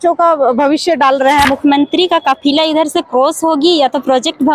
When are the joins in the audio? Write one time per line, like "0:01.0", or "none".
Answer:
0:01.4